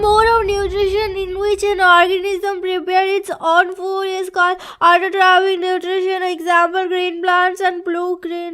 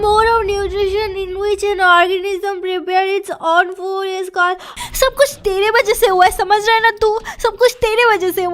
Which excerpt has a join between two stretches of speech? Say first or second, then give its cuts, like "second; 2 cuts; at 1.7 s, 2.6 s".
second; 1 cut; at 4.7 s